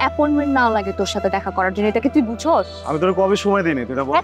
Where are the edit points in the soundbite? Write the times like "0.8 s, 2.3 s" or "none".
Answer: none